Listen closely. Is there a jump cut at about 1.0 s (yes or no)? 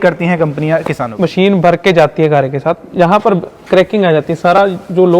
yes